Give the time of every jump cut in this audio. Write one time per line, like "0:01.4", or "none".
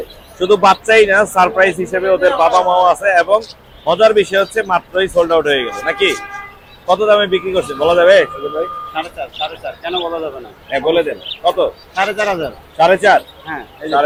none